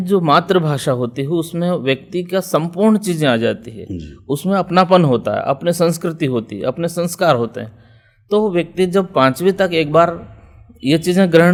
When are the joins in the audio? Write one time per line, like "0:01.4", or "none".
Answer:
none